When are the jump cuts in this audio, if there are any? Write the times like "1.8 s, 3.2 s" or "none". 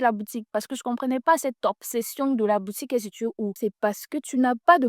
3.5 s